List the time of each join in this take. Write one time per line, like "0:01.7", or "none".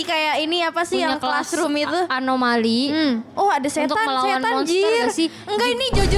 0:03.3